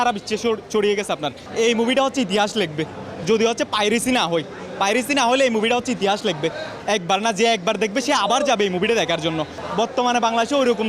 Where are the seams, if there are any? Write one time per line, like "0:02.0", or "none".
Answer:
0:01.4
0:06.7
0:09.6